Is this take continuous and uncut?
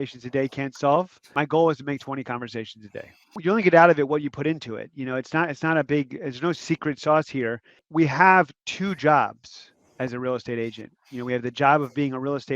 no; 2 cuts; at 1.3 s, 3.3 s

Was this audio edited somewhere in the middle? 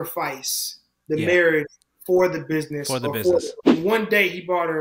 yes; 1 cut; at 3.6 s

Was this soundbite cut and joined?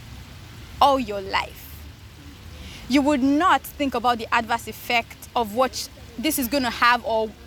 no; 0 cuts

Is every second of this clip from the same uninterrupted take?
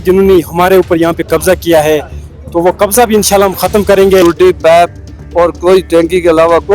no; 1 cut; at 4.2 s

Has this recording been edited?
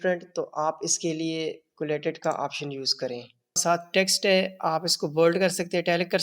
yes; 1 cut; at 3.6 s

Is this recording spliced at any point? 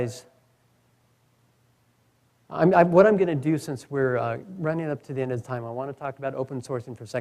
no; 0 cuts

